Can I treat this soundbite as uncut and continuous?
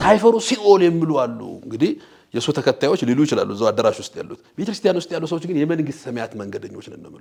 yes; 0 cuts

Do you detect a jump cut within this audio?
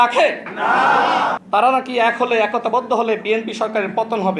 yes; 1 cut; at 1.4 s

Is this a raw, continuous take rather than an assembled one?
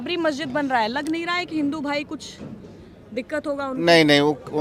yes; 0 cuts

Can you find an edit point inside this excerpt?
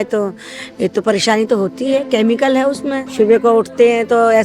yes; 1 cut; at 3.0 s

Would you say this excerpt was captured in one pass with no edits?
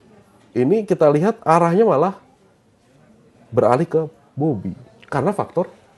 yes; 0 cuts

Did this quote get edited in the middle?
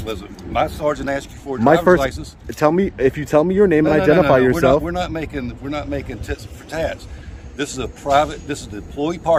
no; 0 cuts

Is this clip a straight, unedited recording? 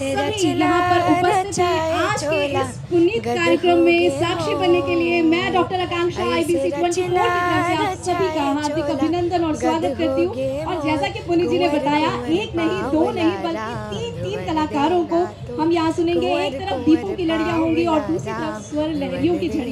yes; 0 cuts

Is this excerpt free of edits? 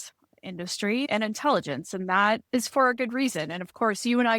no; 2 cuts; at 1.1 s, 2.4 s

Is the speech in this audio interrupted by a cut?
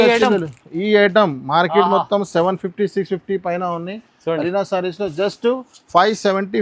no; 0 cuts

